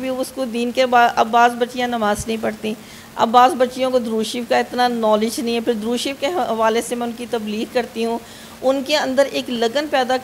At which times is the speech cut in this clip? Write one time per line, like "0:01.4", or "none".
none